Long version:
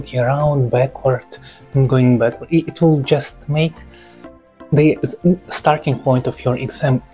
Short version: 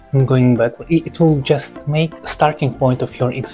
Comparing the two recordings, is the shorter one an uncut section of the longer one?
no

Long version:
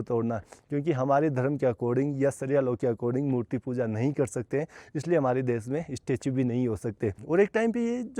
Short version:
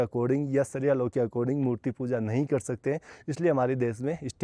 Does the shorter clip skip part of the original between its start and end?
no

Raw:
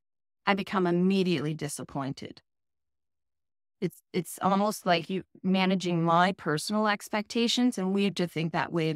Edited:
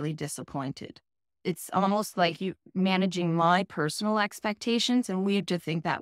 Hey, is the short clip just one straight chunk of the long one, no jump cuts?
no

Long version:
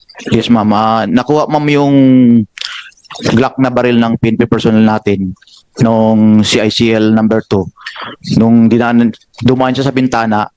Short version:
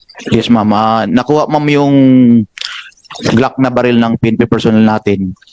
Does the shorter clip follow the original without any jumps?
yes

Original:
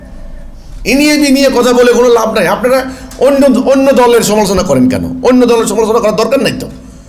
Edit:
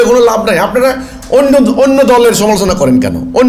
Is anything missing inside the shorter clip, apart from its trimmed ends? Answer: no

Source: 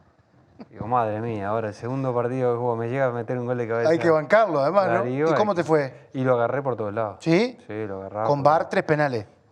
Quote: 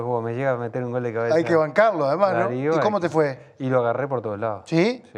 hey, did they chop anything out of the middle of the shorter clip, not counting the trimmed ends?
no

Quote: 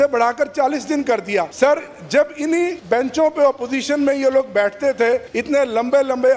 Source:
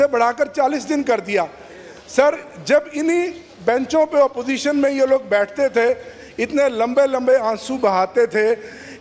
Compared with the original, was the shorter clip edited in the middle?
yes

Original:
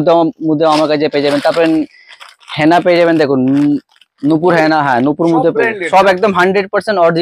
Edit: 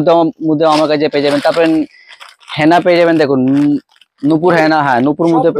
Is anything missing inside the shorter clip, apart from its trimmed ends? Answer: no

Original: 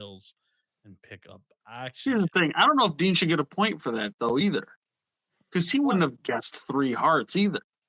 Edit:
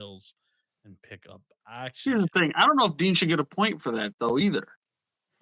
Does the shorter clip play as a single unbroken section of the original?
yes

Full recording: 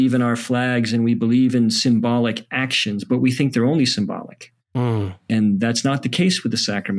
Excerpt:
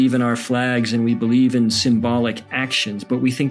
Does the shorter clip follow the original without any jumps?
yes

